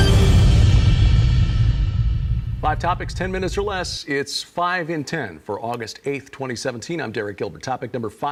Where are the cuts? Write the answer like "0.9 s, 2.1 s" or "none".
none